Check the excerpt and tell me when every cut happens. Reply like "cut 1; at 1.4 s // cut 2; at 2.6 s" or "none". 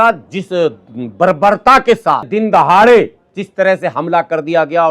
cut 1; at 2.3 s